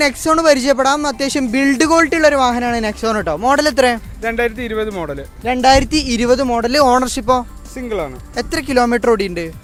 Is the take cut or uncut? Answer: uncut